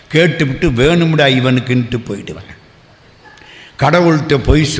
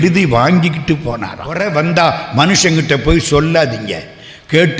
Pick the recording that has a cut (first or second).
second